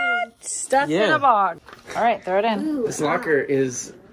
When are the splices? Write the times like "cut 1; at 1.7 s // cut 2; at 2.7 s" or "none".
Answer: cut 1; at 1.6 s